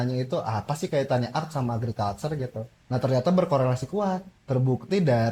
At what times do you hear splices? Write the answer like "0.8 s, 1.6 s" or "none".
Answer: 2.7 s, 4.3 s